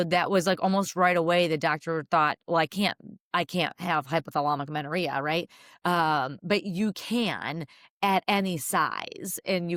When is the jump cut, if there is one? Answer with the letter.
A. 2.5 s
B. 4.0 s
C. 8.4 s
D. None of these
D